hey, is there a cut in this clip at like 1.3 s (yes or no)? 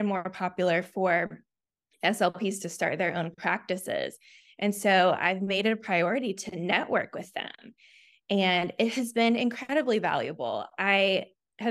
no